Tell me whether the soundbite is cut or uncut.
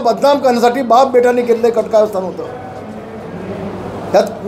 uncut